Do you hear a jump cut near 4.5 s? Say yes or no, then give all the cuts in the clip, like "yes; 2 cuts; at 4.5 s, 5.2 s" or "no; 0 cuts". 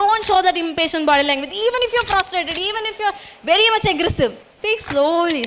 yes; 1 cut; at 4.5 s